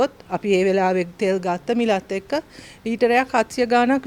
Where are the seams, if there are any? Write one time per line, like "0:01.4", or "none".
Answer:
none